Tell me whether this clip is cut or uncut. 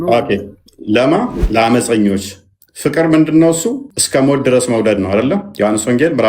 cut